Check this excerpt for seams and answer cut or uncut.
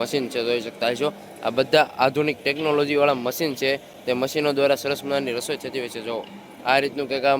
uncut